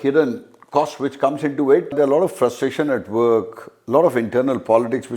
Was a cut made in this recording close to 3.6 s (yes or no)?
no